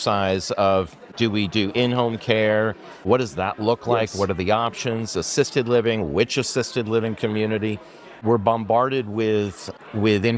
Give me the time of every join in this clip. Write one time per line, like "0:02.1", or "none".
0:01.0
0:03.1
0:08.2